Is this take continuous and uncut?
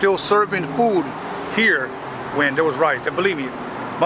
yes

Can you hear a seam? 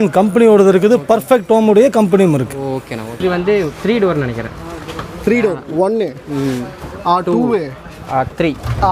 yes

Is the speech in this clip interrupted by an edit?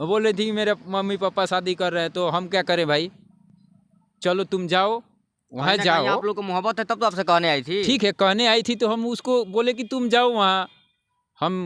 no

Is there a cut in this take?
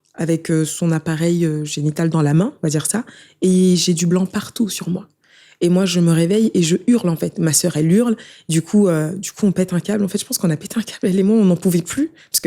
no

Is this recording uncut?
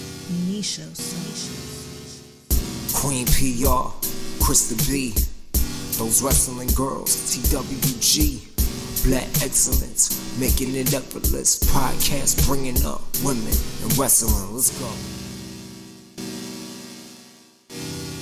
yes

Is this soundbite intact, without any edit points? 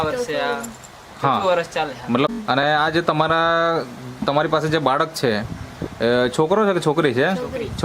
no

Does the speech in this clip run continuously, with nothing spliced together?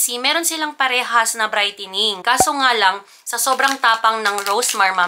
no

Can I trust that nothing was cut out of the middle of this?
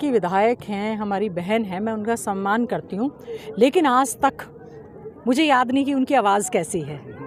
yes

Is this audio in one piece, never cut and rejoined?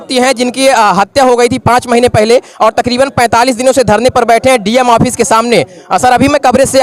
yes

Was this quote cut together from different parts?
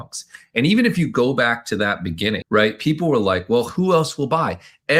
no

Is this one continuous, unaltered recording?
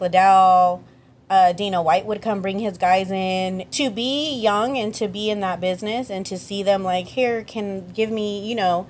no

